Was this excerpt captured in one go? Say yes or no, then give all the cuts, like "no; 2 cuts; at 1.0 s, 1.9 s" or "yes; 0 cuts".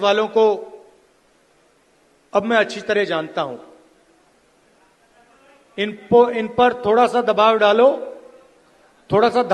yes; 0 cuts